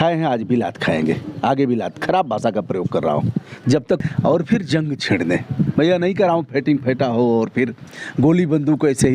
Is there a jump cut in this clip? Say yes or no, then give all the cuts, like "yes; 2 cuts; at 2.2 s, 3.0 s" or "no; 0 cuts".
yes; 1 cut; at 4.0 s